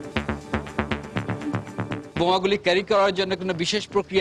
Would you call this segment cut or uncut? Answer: cut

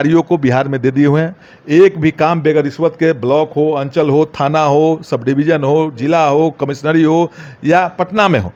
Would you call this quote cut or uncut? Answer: uncut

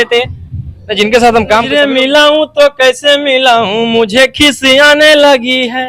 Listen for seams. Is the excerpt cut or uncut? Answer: cut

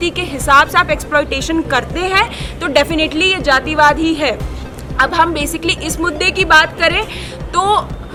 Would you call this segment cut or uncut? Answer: uncut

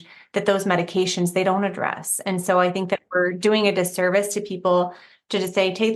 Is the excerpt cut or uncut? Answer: uncut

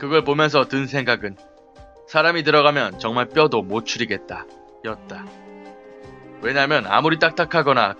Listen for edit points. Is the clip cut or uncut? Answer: cut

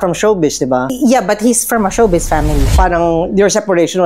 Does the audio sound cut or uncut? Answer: cut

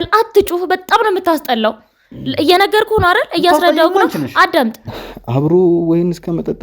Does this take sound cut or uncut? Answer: cut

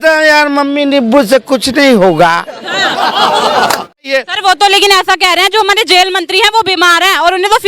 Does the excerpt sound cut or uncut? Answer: cut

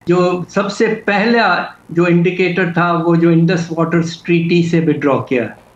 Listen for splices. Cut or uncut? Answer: uncut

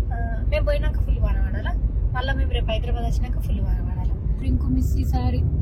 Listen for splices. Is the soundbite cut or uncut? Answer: cut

